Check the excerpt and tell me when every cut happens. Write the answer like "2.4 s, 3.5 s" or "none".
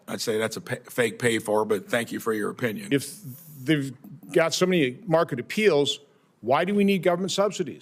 none